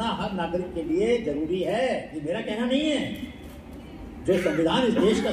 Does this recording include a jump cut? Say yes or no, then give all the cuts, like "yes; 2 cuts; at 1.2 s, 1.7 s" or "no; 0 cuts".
yes; 1 cut; at 2.1 s